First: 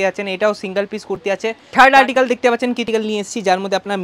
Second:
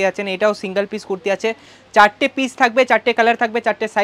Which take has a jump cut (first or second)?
first